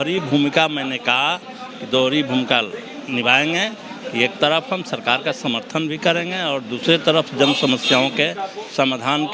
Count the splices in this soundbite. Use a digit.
0